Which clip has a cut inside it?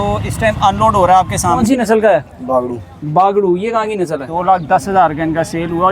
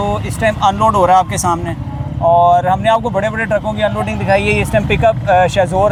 first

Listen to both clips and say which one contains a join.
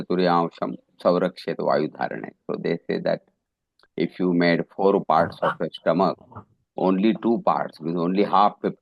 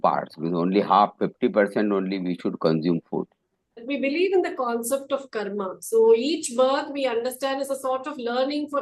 second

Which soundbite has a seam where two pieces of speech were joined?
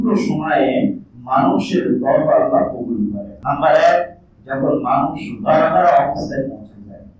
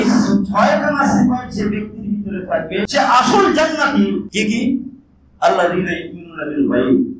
second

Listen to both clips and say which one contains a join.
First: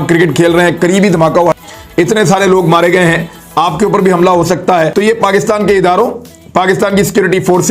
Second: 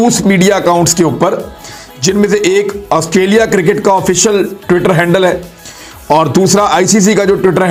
first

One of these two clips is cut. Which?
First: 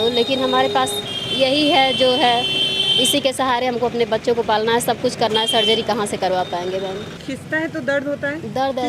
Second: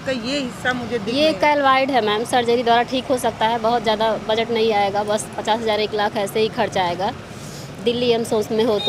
first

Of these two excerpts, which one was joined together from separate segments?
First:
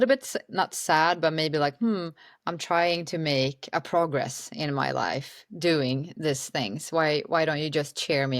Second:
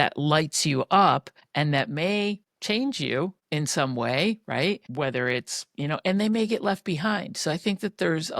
second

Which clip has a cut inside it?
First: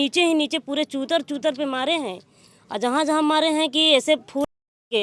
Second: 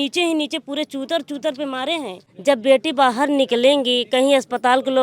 second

